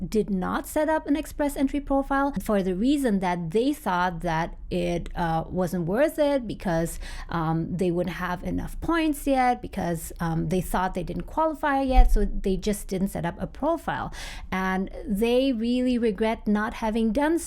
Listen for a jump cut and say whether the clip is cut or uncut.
uncut